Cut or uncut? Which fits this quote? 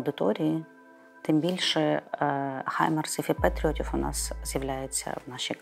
uncut